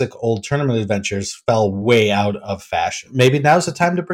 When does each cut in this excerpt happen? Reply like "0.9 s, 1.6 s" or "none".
1.8 s, 3.1 s